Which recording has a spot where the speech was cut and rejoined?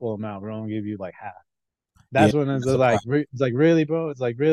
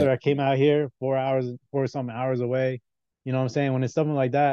first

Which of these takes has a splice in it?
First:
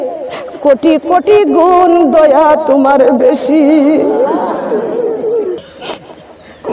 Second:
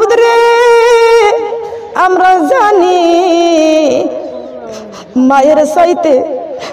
first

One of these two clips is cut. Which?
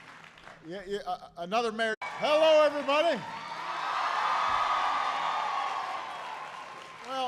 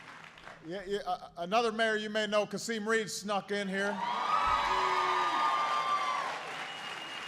second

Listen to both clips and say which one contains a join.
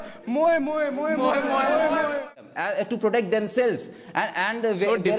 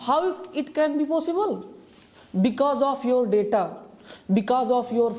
first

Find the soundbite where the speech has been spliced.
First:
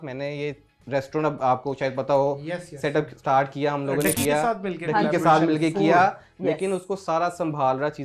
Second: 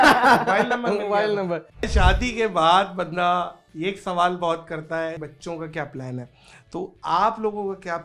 second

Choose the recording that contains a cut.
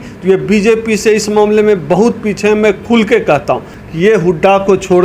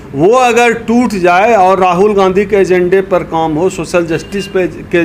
first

